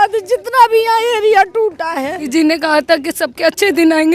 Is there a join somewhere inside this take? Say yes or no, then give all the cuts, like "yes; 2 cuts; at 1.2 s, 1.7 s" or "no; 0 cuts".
yes; 1 cut; at 2.2 s